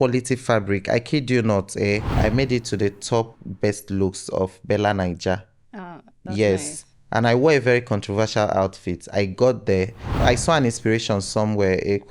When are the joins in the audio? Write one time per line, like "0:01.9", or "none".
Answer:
0:02.1
0:10.2